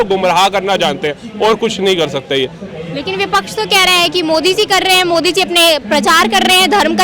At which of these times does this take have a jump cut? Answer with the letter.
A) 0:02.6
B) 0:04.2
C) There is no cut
C